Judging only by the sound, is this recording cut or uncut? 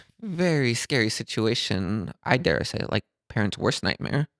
cut